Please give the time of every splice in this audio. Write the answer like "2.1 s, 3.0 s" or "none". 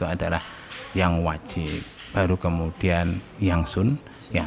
none